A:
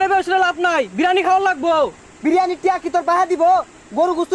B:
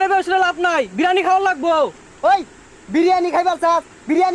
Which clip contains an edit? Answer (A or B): A